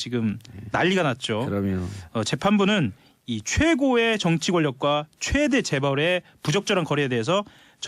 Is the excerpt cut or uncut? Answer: cut